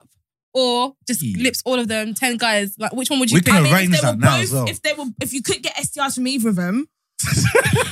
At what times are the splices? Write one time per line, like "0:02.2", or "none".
none